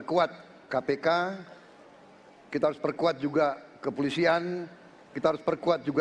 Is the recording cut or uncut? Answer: uncut